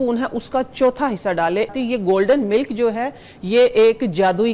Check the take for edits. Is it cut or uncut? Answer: cut